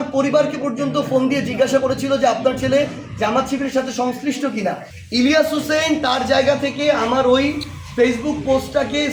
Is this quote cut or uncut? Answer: cut